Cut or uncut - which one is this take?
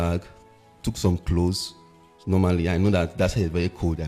uncut